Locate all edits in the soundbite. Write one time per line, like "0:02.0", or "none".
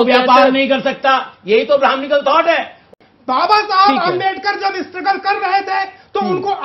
0:02.9